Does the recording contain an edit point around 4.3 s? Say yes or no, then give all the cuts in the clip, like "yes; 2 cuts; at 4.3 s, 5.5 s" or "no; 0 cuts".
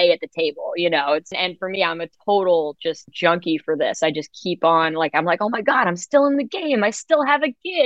no; 2 cuts; at 1.3 s, 3.1 s